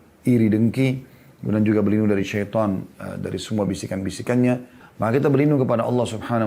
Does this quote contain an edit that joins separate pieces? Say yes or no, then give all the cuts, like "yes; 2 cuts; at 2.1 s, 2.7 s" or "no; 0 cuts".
yes; 1 cut; at 4.8 s